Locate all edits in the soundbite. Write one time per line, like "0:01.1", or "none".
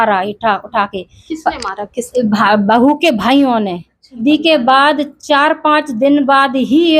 0:04.2